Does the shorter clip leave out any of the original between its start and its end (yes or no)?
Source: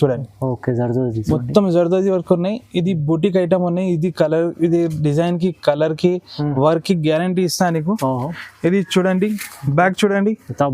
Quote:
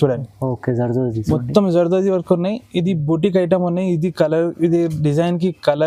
no